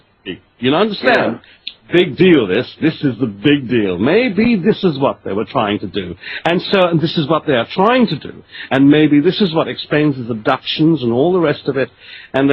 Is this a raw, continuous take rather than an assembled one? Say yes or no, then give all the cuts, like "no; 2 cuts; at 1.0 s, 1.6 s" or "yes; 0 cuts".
no; 1 cut; at 8.9 s